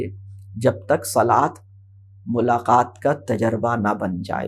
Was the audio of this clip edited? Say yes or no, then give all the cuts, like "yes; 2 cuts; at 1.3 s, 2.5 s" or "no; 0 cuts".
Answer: no; 0 cuts